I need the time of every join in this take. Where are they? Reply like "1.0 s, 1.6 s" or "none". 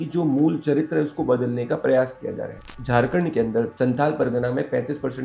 2.8 s, 3.7 s